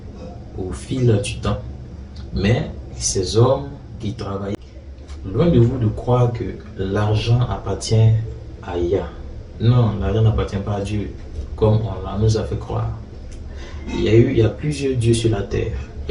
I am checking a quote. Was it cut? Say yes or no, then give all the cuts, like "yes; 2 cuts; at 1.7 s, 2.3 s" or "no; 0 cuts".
yes; 1 cut; at 4.5 s